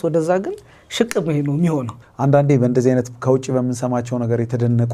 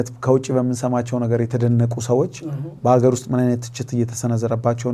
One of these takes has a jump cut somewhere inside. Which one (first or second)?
first